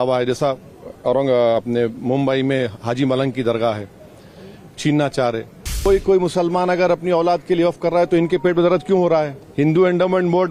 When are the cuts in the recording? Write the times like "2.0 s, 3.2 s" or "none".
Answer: 5.9 s, 9.4 s